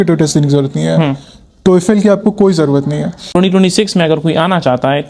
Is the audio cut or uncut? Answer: cut